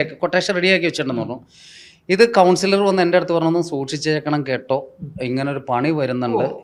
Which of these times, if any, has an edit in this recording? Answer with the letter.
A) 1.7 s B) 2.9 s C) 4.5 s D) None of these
D